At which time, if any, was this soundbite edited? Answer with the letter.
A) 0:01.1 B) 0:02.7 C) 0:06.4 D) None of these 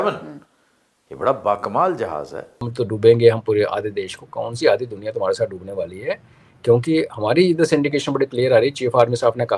B